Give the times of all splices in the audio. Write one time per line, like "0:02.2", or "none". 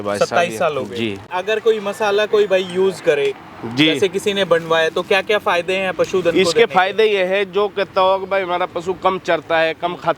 0:01.3